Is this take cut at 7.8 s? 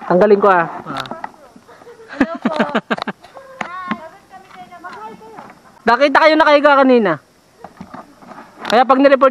no; 1 cut; at 5.6 s

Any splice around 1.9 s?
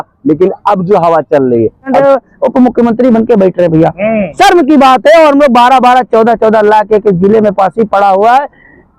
yes; 1 cut; at 1.9 s

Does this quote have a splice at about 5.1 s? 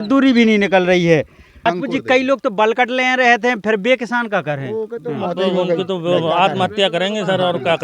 no; 1 cut; at 1.6 s

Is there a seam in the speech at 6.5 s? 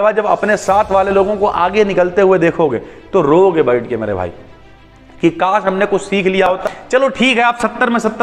yes; 1 cut; at 6.5 s

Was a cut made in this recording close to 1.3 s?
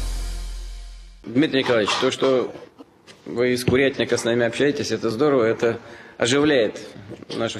yes; 1 cut; at 1.3 s

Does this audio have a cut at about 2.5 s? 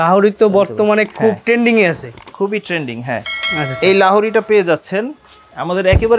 no; 0 cuts

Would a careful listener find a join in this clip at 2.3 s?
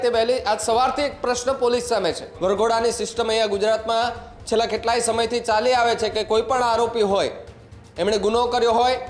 yes; 1 cut; at 2.3 s

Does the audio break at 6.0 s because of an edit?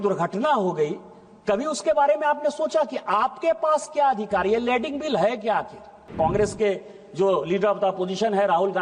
yes; 1 cut; at 6.0 s

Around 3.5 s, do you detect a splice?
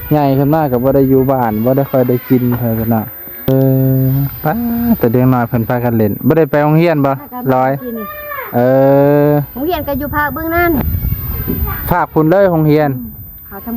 yes; 1 cut; at 3.5 s

